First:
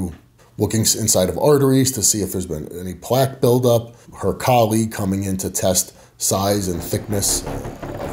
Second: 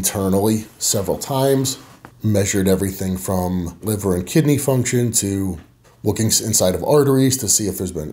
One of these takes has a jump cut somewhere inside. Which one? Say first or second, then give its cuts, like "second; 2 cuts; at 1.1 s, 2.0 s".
second; 1 cut; at 3.8 s